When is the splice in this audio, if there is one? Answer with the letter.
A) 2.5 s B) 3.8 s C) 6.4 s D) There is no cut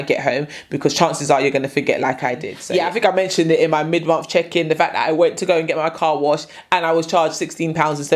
A